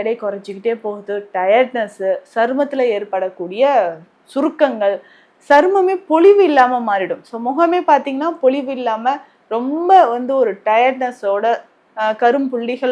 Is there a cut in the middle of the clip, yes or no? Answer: no